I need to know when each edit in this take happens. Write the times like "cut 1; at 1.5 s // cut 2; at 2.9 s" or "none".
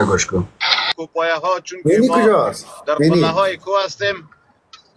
cut 1; at 1.0 s